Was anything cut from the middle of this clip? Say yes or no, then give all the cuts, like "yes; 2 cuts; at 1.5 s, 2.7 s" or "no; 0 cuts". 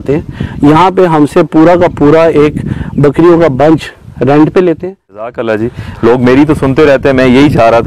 yes; 1 cut; at 5.3 s